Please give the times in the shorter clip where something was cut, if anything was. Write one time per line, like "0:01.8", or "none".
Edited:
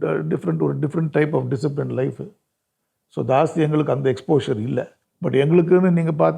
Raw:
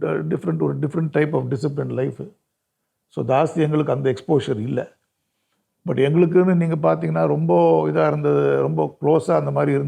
0:05.0